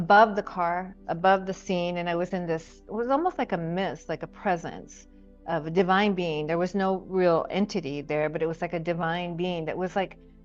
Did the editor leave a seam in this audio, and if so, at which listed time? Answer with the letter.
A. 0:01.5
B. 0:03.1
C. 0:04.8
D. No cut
D